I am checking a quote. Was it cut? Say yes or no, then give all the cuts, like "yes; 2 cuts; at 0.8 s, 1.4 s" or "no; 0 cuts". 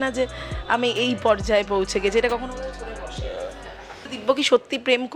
yes; 1 cut; at 4.0 s